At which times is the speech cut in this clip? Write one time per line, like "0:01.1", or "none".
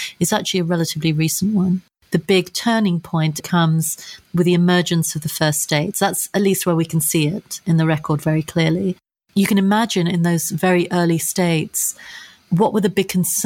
0:01.9
0:03.4
0:09.4